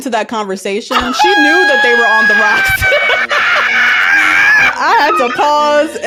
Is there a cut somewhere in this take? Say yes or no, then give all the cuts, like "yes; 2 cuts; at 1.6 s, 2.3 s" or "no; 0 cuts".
no; 0 cuts